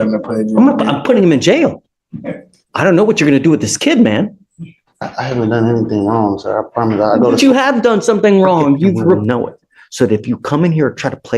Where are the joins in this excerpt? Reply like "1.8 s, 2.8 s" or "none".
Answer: 9.2 s